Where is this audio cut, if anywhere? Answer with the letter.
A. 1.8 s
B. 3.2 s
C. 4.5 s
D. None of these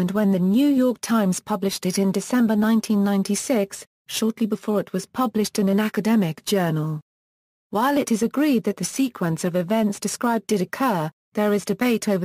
A